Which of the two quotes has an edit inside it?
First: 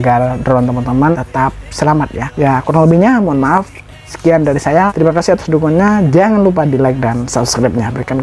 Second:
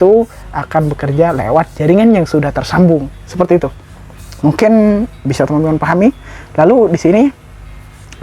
first; 3 cuts; at 1.1 s, 2.2 s, 4.9 s

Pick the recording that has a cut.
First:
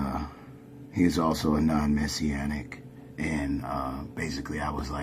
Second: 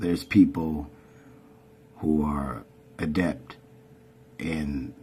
first; 1 cut; at 1.9 s

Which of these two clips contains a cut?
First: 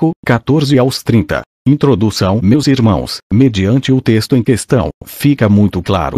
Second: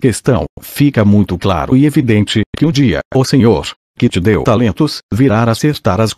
second; 1 cut; at 3.6 s

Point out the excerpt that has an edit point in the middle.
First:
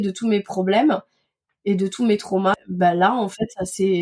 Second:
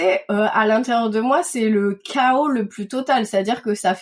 first; 1 cut; at 2.5 s

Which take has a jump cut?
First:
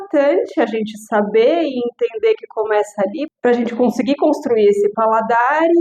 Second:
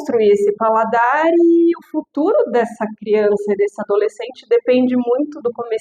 first; 1 cut; at 3.3 s

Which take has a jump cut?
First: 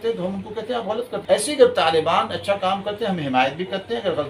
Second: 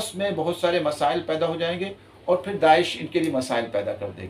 first; 1 cut; at 1.2 s

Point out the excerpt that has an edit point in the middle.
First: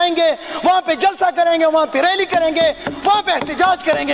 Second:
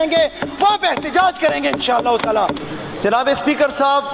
second; 1 cut; at 2.6 s

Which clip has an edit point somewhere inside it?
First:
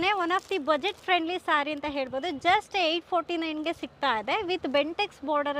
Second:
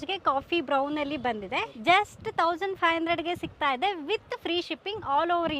second; 1 cut; at 1.7 s

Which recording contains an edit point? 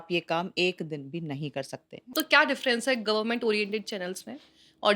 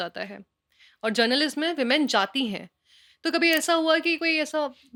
first; 1 cut; at 2.1 s

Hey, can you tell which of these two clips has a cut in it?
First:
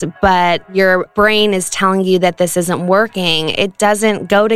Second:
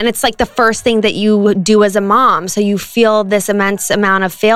first; 1 cut; at 1.0 s

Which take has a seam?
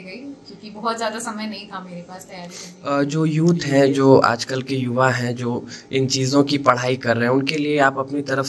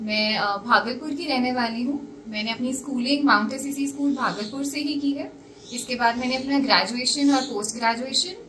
first; 1 cut; at 2.7 s

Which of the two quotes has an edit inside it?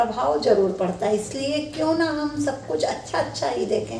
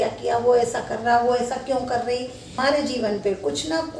second; 1 cut; at 2.5 s

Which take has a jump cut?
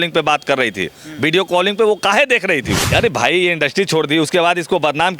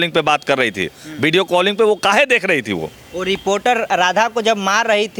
first; 1 cut; at 2.8 s

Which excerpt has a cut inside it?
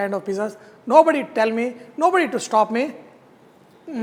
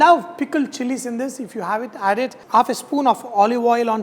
second; 1 cut; at 2.4 s

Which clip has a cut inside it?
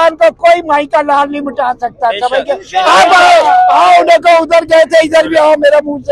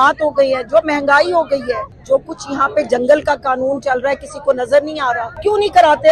second; 2 cuts; at 2.0 s, 5.3 s

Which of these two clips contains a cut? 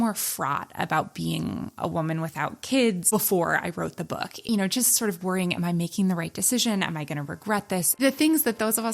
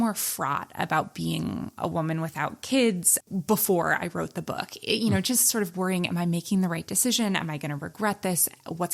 first; 3 cuts; at 3.0 s, 4.5 s, 8.0 s

